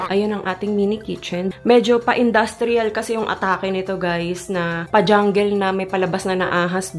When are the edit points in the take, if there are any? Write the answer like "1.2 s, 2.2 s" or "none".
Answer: 1.4 s, 4.8 s